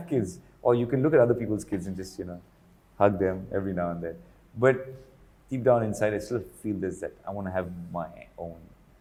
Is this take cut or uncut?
uncut